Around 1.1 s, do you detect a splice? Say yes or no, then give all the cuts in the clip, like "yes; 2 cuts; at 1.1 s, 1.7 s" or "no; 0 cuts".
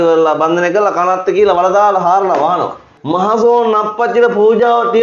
no; 1 cut; at 2.9 s